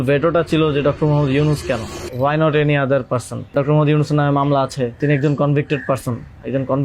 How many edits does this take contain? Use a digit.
3